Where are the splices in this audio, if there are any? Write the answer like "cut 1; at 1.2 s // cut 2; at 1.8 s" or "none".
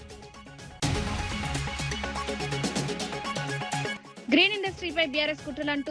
cut 1; at 0.7 s // cut 2; at 2.2 s // cut 3; at 4.1 s